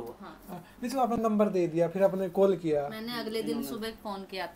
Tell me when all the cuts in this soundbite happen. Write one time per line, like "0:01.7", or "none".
none